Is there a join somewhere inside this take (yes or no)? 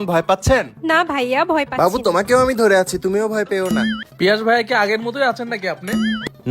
yes